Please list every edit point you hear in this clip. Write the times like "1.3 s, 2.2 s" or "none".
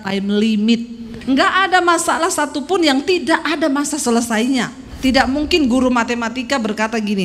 1.1 s, 4.9 s